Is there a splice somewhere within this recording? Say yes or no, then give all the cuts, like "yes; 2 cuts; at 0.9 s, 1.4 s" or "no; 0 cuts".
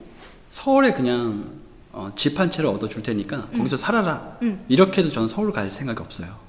no; 0 cuts